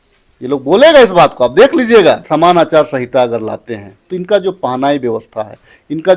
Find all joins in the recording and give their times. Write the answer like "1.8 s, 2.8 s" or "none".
2.2 s